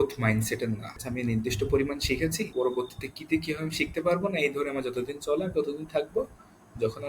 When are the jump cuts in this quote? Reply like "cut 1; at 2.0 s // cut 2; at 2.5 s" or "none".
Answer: cut 1; at 1.0 s // cut 2; at 2.5 s